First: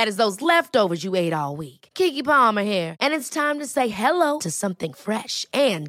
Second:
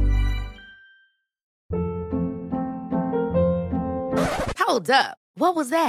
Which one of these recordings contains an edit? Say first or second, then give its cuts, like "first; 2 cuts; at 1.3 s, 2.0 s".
second; 1 cut; at 1.5 s